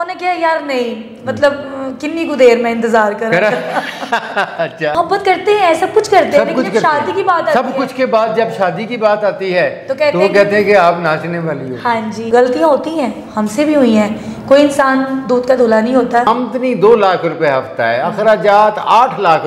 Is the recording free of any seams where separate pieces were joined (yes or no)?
no